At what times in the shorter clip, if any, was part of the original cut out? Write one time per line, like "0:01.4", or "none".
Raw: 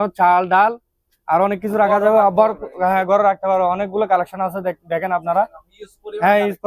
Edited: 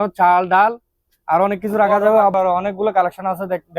0:02.3

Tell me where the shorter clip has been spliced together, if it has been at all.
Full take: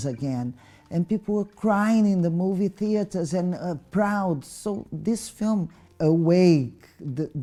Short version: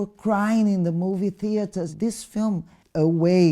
0:01.9

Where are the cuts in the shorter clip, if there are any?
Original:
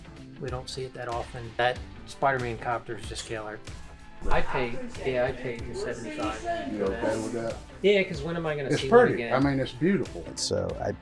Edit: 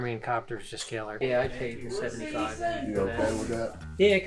0:01.1

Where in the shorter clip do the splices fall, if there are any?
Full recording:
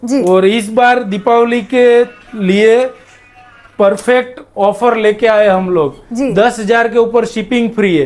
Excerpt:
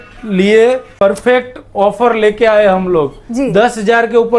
0:01.0

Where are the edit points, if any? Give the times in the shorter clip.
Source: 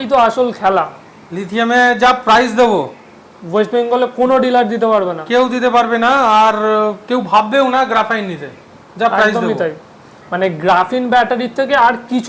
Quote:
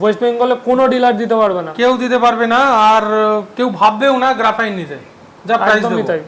none

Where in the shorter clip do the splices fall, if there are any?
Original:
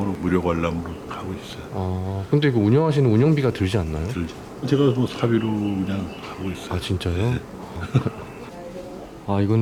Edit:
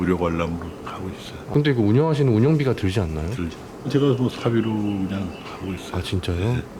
0:01.4

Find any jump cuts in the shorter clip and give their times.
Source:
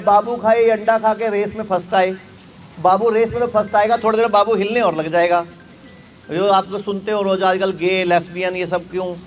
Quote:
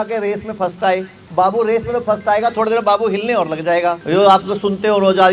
0:01.2
0:04.0

